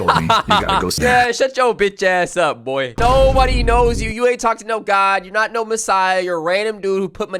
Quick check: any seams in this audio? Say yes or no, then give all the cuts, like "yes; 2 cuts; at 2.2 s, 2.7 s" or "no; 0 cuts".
yes; 1 cut; at 1.0 s